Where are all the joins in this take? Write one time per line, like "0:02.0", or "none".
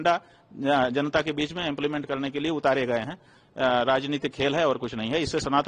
none